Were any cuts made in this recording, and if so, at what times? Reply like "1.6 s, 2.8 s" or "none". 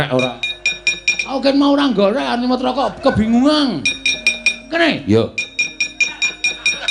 none